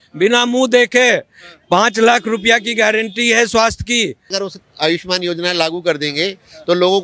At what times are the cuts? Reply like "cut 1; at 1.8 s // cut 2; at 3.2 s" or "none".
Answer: cut 1; at 4.3 s